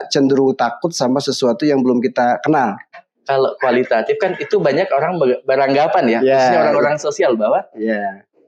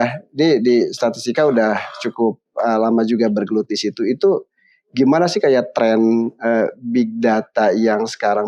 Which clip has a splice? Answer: first; 1 cut; at 3.0 s

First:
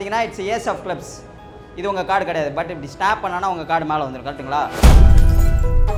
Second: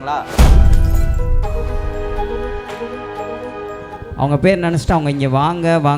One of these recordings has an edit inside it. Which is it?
second; 1 cut; at 4.0 s

